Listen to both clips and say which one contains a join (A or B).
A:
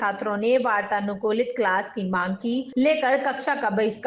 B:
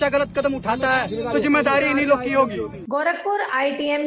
B